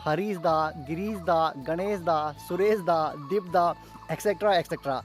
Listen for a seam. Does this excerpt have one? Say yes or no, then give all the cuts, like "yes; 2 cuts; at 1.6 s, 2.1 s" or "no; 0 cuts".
no; 0 cuts